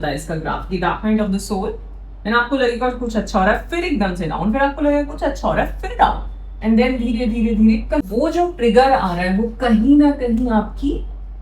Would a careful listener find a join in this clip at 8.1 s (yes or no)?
yes